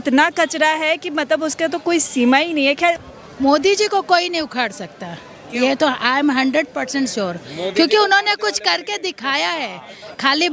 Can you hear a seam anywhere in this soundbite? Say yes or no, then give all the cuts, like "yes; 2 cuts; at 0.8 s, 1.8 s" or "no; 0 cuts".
yes; 1 cut; at 3.1 s